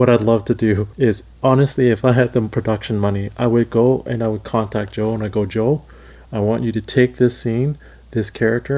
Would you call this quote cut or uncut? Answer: cut